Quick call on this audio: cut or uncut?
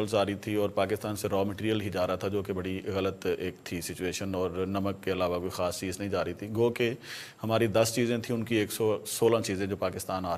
uncut